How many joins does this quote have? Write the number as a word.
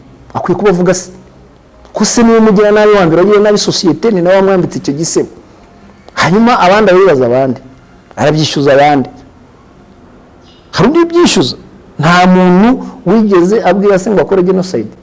zero